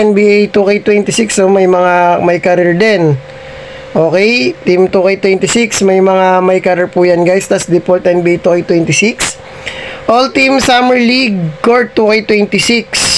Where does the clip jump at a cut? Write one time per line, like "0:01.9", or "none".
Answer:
none